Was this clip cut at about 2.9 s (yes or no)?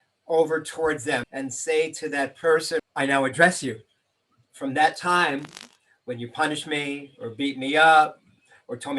yes